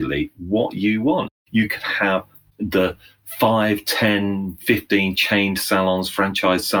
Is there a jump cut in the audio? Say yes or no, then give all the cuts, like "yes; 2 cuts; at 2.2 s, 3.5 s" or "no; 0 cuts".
yes; 2 cuts; at 1.3 s, 2.4 s